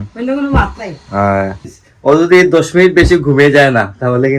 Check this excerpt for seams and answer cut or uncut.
cut